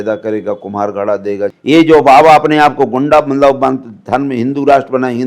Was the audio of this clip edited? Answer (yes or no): yes